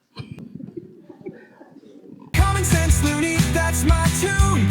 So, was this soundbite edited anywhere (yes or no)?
yes